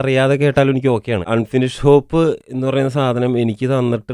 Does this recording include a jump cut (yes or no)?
yes